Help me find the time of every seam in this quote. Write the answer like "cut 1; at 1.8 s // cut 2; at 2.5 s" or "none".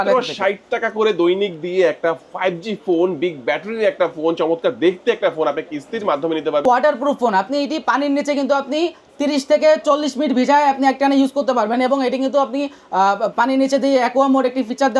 cut 1; at 6.6 s